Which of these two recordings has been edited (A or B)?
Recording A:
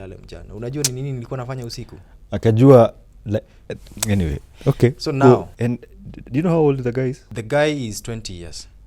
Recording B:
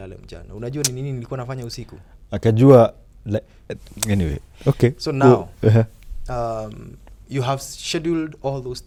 A